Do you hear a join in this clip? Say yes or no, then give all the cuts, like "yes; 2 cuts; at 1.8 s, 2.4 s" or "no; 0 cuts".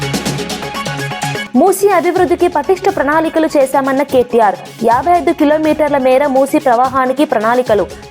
yes; 1 cut; at 1.4 s